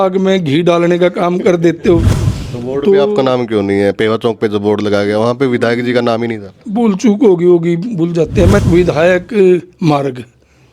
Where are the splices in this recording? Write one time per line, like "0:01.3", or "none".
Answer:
0:02.2
0:08.6

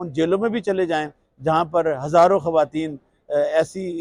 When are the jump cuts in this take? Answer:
none

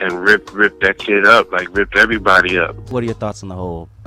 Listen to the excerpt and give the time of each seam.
0:02.9

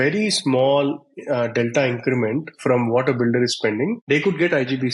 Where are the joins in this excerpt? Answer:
0:04.0

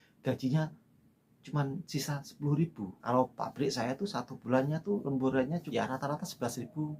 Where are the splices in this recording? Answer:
0:03.0
0:05.2

